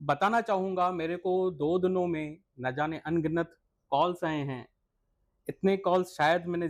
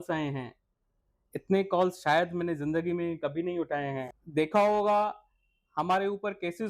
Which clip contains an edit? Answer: second; 1 cut; at 4.1 s

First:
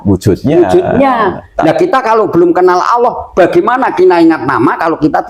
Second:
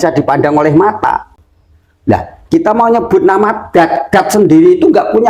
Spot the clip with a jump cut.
second; 1 cut; at 1.3 s

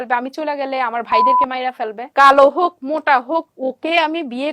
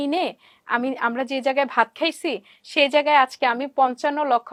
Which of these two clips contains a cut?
first; 2 cuts; at 2.0 s, 3.5 s

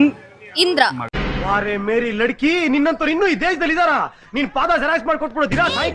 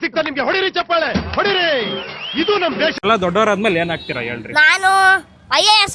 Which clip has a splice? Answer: second; 1 cut; at 3.0 s

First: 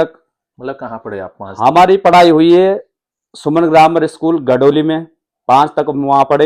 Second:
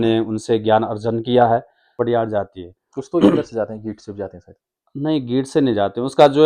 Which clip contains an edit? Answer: second; 1 cut; at 2.0 s

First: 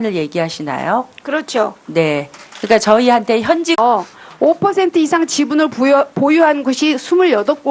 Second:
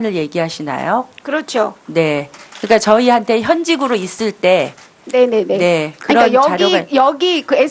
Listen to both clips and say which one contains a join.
second; 1 cut; at 3.8 s

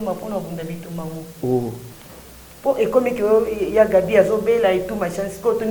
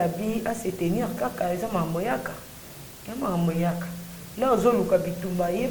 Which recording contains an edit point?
first; 1 cut; at 1.9 s

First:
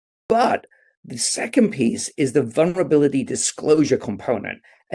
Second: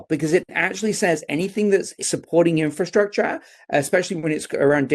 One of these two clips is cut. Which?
second; 1 cut; at 2.0 s

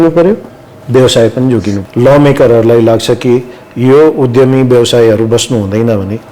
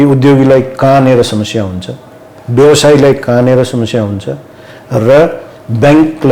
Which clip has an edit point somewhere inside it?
first; 1 cut; at 1.8 s

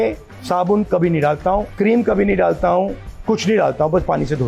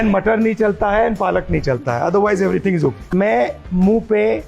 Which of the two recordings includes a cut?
second; 1 cut; at 3.1 s

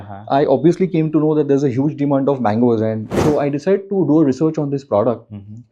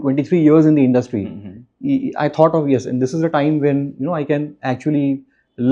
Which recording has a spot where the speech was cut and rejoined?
first; 1 cut; at 3.1 s

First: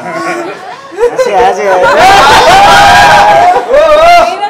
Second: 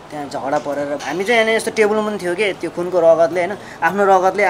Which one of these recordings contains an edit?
second; 1 cut; at 1.0 s

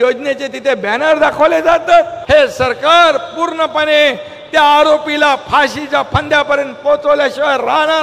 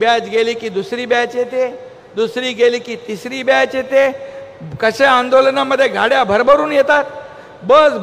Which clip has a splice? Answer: first; 1 cut; at 2.2 s

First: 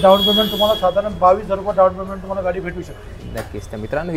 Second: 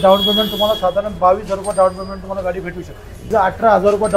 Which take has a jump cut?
second; 1 cut; at 3.3 s

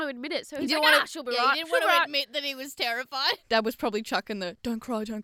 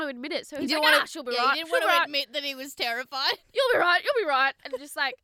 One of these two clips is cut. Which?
first; 1 cut; at 3.4 s

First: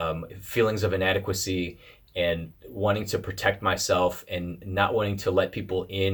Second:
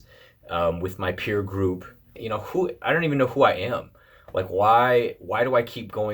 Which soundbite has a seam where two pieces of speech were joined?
second; 1 cut; at 2.2 s

